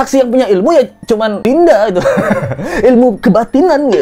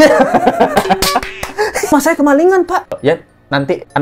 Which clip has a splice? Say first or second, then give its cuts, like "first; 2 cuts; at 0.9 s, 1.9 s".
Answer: second; 2 cuts; at 1.9 s, 3.0 s